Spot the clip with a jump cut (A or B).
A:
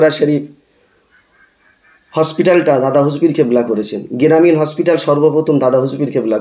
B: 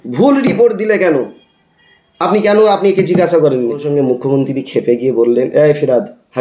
B